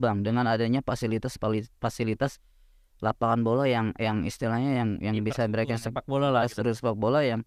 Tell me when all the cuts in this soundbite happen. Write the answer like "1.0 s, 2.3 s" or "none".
none